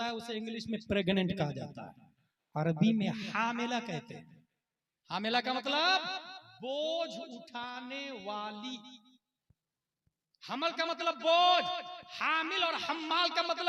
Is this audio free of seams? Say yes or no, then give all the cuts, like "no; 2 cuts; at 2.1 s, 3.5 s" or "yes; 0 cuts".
yes; 0 cuts